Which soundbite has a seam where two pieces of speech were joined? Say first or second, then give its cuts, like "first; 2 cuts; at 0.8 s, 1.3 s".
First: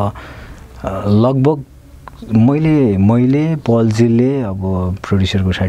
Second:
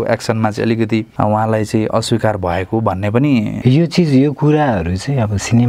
second; 2 cuts; at 1.1 s, 3.5 s